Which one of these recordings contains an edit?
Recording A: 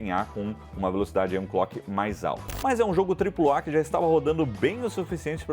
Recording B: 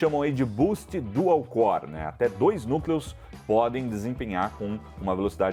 A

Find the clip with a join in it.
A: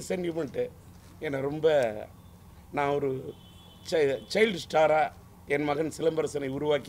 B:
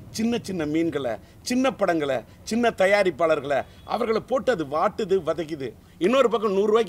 B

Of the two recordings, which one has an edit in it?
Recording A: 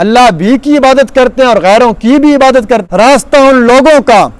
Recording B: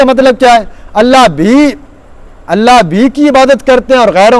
A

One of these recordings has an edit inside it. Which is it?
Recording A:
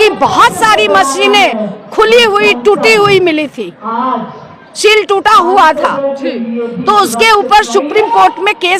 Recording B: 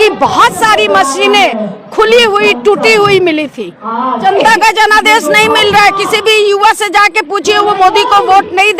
B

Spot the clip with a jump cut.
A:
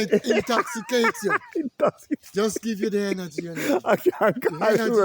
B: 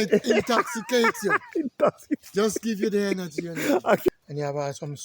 B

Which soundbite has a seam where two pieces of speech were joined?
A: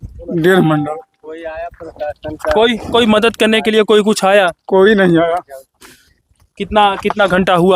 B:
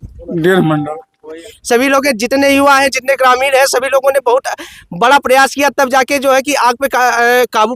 B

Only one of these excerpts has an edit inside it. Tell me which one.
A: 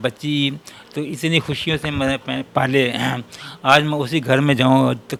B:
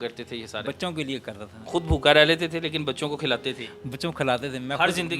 B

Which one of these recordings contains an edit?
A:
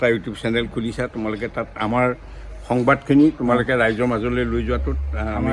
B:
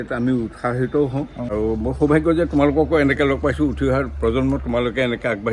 B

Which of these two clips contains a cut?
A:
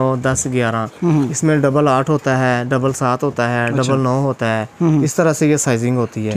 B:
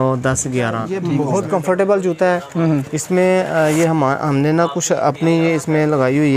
B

